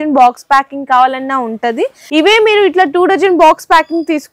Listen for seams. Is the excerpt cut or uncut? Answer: cut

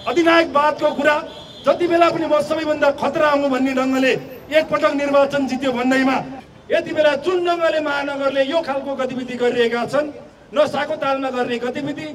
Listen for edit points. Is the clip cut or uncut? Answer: cut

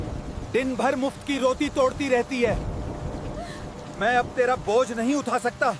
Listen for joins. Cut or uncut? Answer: uncut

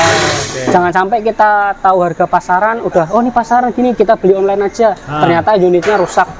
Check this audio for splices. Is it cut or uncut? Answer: uncut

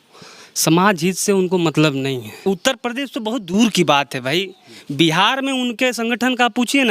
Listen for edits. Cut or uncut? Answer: cut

